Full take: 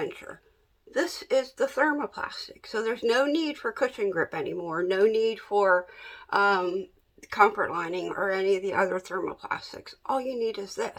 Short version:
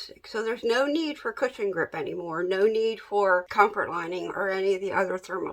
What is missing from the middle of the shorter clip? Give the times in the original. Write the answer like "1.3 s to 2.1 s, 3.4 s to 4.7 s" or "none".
5.9 s to 7.3 s